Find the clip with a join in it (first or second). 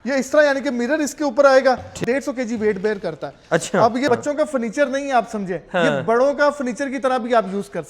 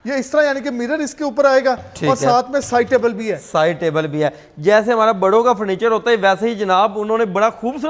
first